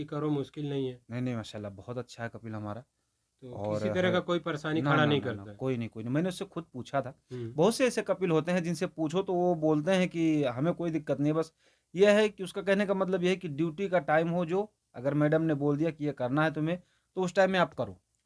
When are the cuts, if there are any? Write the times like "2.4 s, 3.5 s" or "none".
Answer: none